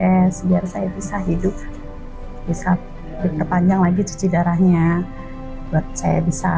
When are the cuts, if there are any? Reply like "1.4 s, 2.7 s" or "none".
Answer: none